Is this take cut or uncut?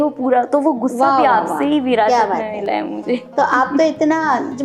uncut